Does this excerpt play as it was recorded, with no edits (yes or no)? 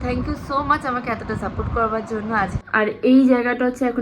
no